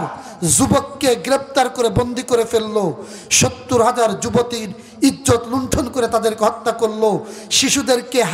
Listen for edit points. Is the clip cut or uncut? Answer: uncut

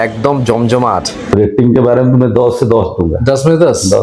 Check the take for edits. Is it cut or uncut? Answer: cut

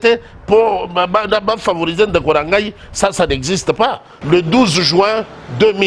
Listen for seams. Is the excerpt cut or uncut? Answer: cut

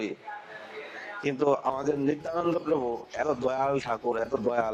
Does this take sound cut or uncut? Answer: uncut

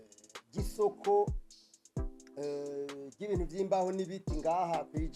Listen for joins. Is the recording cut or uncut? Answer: uncut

